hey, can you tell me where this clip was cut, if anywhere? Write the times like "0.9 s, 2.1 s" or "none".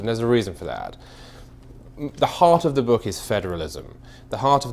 3.0 s